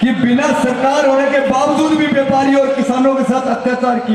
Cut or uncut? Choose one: uncut